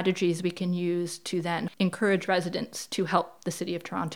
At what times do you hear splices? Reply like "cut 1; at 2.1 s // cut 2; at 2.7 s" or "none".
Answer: cut 1; at 1.7 s